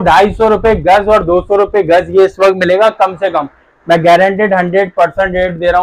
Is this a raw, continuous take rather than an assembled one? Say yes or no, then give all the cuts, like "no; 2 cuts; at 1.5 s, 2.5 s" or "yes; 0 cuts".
yes; 0 cuts